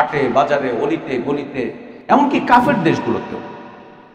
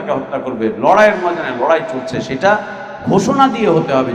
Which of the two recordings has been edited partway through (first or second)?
first